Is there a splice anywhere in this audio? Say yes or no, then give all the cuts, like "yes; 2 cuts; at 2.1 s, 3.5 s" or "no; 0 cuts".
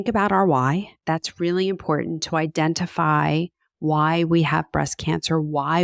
yes; 1 cut; at 1.0 s